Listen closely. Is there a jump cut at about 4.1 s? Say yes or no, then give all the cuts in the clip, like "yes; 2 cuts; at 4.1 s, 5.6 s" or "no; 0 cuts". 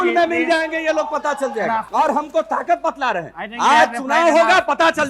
no; 1 cut; at 1.9 s